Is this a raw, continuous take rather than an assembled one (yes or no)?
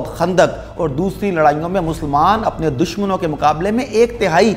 yes